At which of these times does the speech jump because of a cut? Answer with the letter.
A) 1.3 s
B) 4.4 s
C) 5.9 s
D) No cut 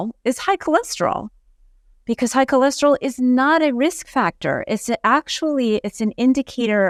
D